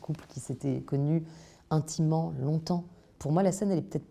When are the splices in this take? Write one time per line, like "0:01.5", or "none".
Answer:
0:00.9
0:03.1